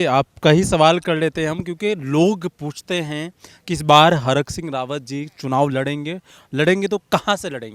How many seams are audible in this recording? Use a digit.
0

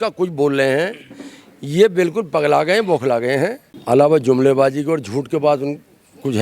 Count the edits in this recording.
1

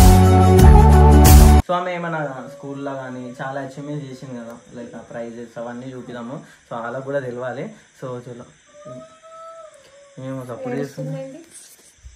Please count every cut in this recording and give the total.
1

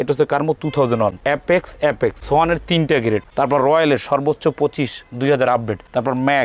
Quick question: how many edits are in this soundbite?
3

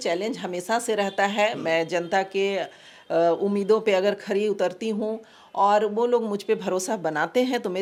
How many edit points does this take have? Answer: 0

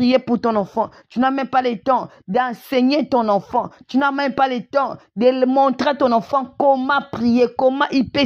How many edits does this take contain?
0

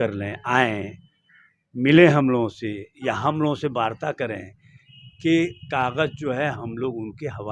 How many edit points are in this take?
0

